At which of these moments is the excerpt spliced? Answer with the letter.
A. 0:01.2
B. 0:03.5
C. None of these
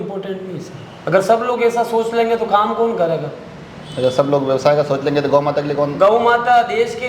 C